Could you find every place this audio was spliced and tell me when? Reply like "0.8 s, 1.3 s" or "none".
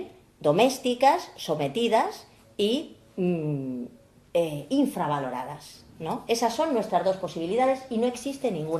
4.1 s